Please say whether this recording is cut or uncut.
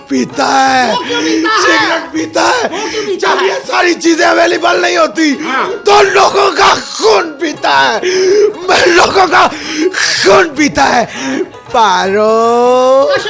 uncut